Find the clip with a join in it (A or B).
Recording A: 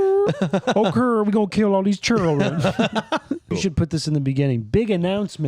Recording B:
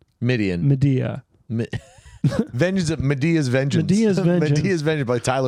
A